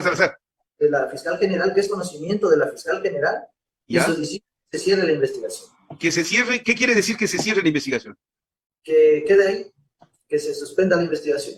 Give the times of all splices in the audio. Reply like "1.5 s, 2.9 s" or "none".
none